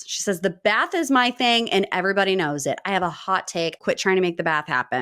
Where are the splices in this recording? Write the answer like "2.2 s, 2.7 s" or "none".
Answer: 3.8 s